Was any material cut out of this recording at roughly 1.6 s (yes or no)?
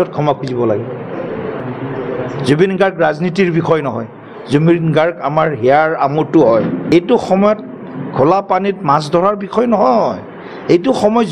yes